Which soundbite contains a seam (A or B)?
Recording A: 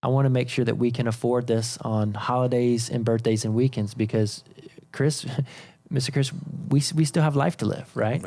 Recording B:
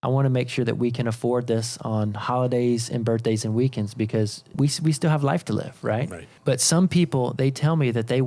B